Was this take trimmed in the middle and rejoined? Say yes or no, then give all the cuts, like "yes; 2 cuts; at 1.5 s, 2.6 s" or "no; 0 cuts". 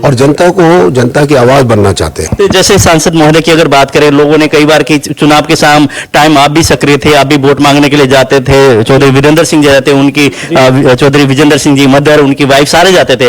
yes; 1 cut; at 2.2 s